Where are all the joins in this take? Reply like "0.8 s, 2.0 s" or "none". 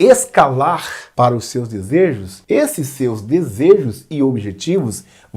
0.9 s, 2.3 s

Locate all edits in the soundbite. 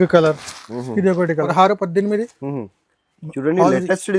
1.4 s

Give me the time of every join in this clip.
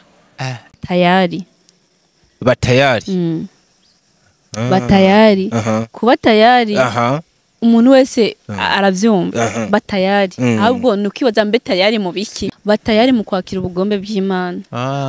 0.8 s, 12.4 s

